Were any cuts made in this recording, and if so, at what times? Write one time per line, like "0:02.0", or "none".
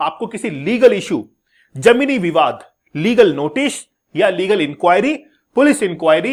none